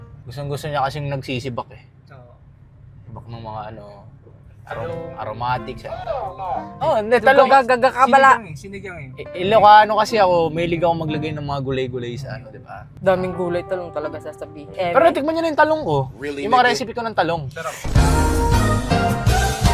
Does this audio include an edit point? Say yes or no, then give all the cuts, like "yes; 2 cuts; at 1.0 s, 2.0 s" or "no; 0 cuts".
no; 0 cuts